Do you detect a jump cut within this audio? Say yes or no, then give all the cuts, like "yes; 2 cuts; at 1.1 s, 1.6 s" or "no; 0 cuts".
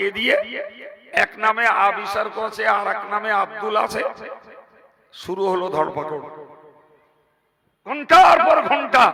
no; 0 cuts